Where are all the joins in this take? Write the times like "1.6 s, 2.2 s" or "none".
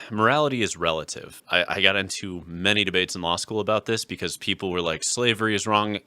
1.4 s